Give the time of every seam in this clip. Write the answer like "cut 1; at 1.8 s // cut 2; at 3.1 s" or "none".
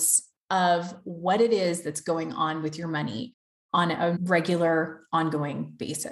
cut 1; at 4.2 s